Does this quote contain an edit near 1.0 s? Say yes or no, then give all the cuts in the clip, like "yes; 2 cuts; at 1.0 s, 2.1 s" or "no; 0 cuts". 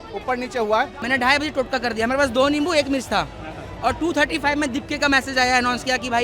yes; 1 cut; at 1.0 s